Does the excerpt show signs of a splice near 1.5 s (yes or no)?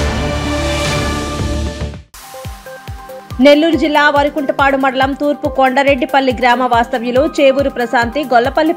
no